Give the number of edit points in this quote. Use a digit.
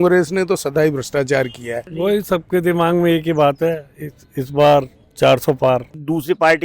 2